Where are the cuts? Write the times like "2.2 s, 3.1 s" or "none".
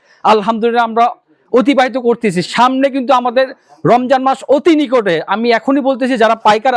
none